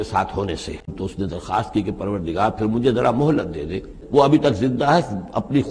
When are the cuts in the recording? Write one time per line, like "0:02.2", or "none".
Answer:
0:01.0
0:03.9